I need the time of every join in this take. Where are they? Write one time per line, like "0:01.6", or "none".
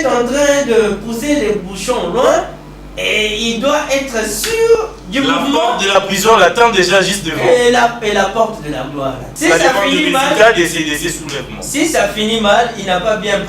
0:09.3